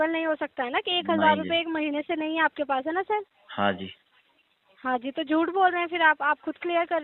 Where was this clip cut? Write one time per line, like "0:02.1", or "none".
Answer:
none